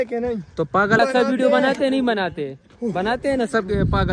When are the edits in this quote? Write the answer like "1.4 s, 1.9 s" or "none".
1.0 s